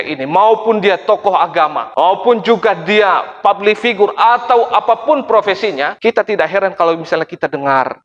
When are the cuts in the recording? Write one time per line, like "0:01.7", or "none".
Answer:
0:05.9